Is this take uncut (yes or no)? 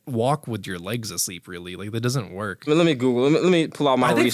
no